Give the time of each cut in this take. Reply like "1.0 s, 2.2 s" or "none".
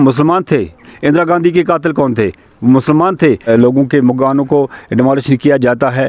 3.5 s

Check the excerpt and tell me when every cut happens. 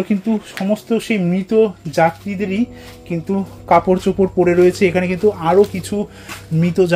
none

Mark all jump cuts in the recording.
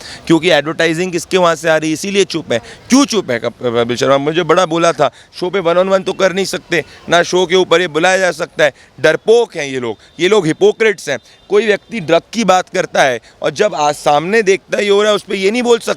none

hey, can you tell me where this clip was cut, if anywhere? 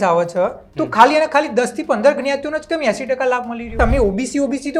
3.7 s

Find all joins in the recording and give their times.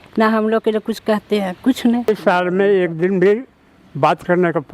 2.1 s

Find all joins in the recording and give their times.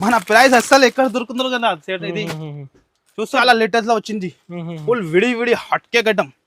3.3 s

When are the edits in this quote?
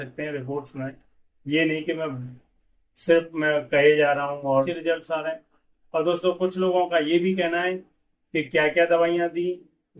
4.7 s

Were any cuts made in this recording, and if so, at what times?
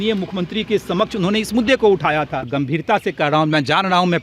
2.4 s

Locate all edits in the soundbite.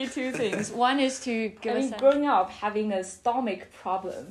1.6 s

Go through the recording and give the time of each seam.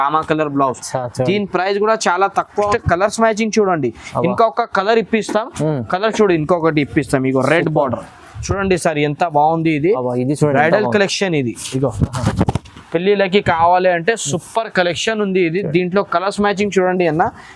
2.7 s

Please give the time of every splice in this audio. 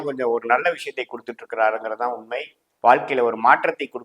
2.6 s

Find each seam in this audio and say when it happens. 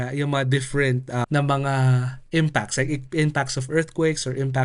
1.2 s

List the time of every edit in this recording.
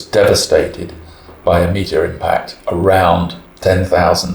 3.4 s

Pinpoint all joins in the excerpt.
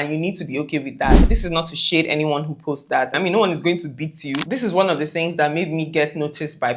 1.3 s, 3.2 s, 4.4 s

